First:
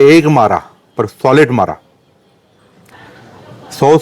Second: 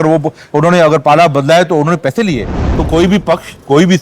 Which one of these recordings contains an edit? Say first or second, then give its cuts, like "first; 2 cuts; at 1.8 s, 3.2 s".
second; 1 cut; at 2.6 s